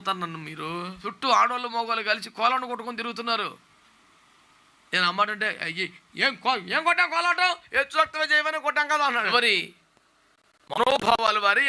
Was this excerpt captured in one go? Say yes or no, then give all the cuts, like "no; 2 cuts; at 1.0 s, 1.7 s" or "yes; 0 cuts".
no; 2 cuts; at 1.0 s, 9.3 s